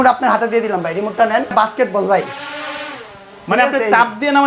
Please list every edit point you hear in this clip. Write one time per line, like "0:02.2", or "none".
0:01.5